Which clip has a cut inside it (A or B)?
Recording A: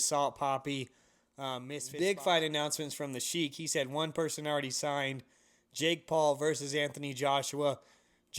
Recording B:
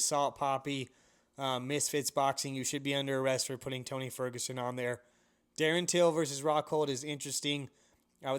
A